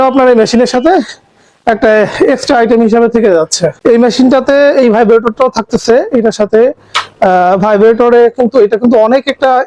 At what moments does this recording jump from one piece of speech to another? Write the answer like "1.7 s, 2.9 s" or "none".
3.8 s